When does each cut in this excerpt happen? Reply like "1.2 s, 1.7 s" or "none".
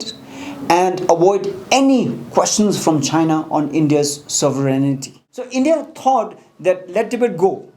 5.3 s